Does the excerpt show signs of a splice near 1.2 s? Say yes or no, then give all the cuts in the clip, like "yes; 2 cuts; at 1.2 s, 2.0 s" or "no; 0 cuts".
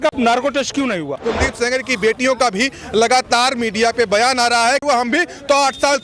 yes; 2 cuts; at 1.2 s, 4.8 s